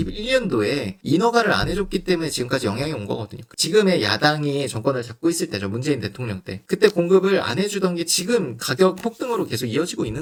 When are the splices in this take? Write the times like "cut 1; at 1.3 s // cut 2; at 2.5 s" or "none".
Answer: none